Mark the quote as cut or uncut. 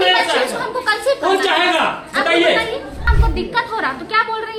cut